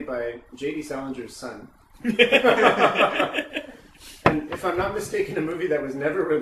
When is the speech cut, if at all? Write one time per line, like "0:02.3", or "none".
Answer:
0:05.3